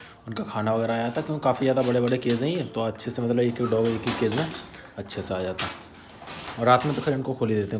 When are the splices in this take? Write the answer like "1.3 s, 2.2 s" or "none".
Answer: none